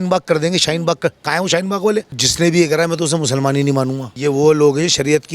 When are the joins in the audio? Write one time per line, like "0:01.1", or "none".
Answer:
0:02.2
0:04.1